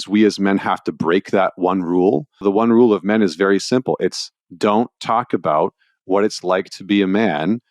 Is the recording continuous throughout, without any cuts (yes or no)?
no